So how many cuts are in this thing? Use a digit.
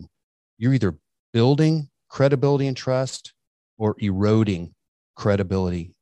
0